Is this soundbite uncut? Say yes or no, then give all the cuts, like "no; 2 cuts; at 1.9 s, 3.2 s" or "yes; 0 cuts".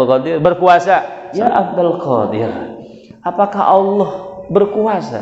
no; 1 cut; at 1.2 s